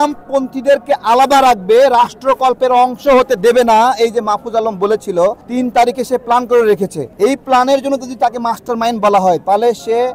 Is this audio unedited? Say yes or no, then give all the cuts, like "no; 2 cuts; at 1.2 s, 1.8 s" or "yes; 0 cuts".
yes; 0 cuts